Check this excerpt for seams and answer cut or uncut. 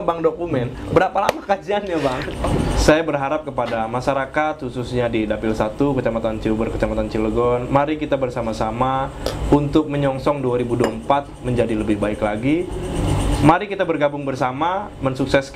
cut